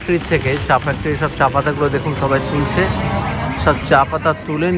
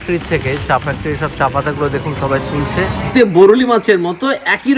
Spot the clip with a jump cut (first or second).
second